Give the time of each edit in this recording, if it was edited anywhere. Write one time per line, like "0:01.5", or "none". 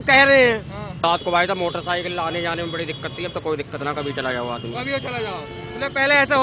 0:01.0